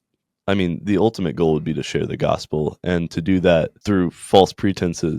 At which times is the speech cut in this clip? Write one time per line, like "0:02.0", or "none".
0:03.8